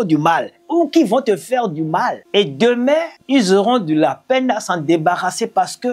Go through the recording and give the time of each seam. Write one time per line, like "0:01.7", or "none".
0:02.2
0:03.2